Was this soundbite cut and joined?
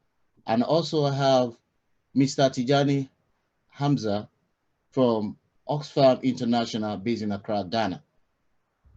no; 0 cuts

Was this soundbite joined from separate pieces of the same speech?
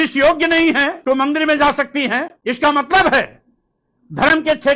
yes; 2 cuts; at 1.0 s, 2.3 s

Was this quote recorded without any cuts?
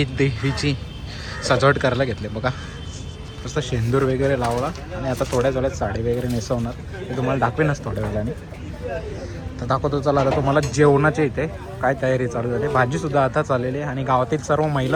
yes; 0 cuts

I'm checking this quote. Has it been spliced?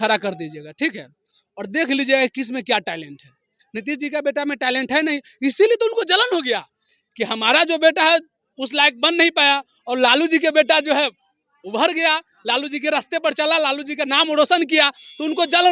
no; 0 cuts

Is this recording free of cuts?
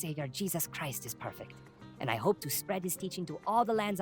yes; 0 cuts

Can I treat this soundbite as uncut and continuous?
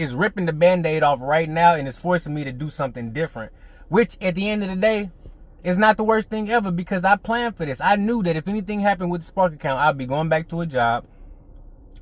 yes; 0 cuts

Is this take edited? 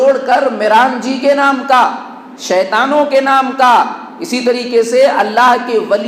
no; 0 cuts

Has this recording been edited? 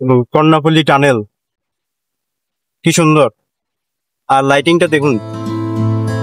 yes; 1 cut; at 5.3 s

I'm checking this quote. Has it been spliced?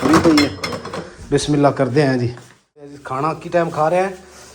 yes; 1 cut; at 3.0 s

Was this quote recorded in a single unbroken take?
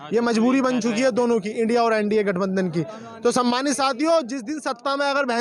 yes; 0 cuts

